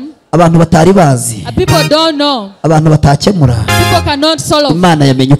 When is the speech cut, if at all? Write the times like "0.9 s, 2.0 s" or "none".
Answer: none